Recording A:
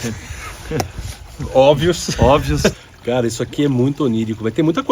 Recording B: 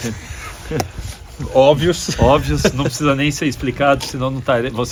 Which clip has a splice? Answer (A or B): A